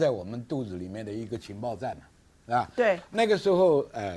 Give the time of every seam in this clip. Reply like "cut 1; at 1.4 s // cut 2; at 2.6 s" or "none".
none